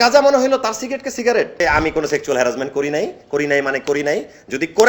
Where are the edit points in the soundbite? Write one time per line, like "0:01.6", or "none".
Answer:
0:01.6